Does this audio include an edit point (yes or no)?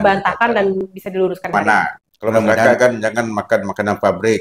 yes